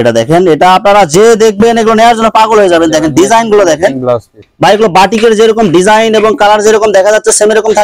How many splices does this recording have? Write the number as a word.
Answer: one